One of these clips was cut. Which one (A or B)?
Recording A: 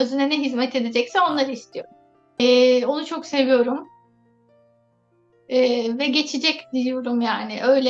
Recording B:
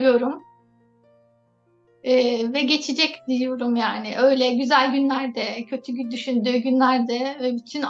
A